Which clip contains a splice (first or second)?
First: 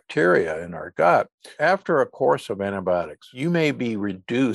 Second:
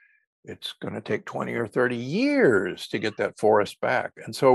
first